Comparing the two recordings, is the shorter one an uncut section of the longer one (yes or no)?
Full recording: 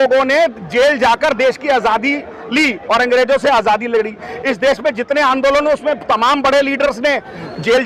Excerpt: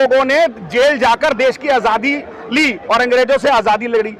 yes